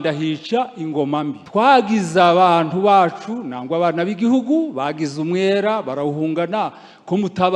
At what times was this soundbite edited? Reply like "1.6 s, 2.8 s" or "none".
1.4 s